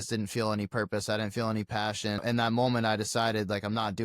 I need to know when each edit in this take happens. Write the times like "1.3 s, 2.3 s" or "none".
2.2 s